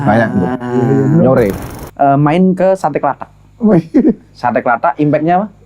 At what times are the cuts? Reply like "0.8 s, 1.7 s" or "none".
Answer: 1.6 s